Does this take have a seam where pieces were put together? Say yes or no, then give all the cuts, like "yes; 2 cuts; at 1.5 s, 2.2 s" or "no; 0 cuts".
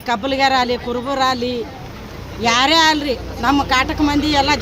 no; 0 cuts